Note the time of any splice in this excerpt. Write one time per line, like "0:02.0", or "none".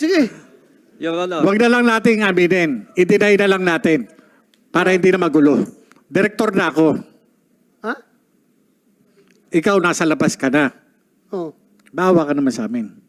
none